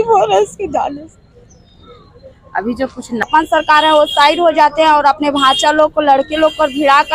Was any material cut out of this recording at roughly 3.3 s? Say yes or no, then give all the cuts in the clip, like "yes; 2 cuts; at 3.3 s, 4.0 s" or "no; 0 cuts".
yes; 1 cut; at 3.3 s